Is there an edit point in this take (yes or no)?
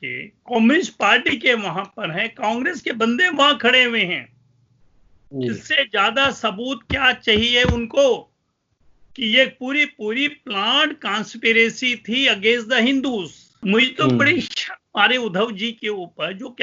yes